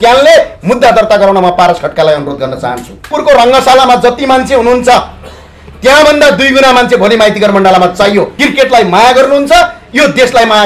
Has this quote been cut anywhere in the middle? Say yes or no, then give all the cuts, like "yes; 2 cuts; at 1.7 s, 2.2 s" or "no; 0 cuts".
yes; 2 cuts; at 3.1 s, 8.4 s